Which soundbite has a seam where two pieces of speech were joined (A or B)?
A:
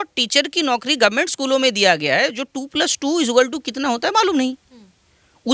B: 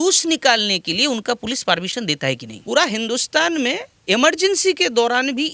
B